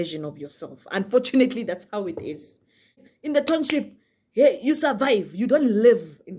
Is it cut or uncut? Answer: cut